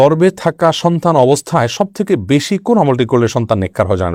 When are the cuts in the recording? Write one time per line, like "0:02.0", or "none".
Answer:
none